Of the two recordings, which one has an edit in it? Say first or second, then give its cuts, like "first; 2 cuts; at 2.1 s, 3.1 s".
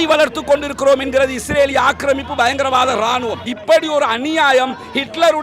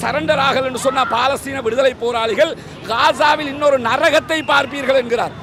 first; 1 cut; at 3.5 s